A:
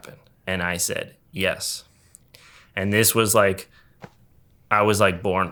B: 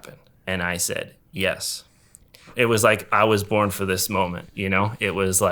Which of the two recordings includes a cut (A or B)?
B